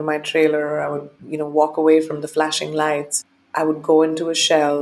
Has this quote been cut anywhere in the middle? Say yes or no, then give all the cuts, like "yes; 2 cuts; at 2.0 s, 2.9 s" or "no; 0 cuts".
yes; 1 cut; at 3.1 s